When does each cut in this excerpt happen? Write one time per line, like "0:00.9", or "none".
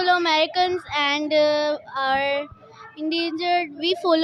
none